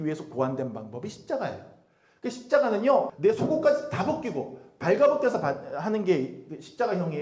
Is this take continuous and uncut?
no; 1 cut; at 3.1 s

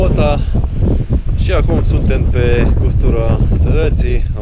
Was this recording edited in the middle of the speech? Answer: no; 0 cuts

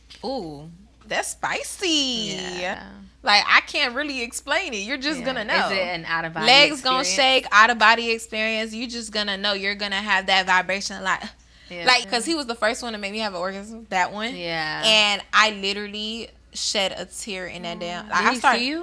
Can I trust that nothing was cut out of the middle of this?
no; 2 cuts; at 2.9 s, 12.1 s

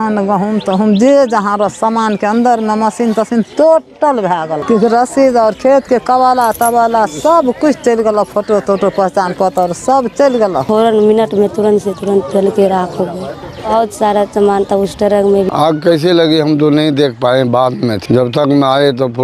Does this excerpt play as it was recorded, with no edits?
no; 4 cuts; at 4.6 s, 10.6 s, 15.5 s, 18.0 s

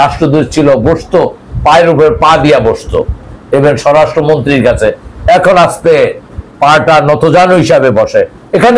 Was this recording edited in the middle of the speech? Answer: no; 0 cuts

